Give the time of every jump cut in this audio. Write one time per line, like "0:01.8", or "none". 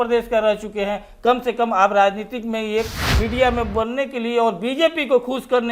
0:03.0